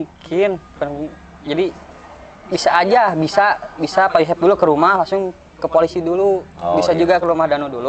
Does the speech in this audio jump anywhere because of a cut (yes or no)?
no